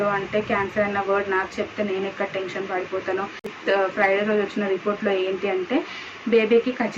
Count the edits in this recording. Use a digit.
1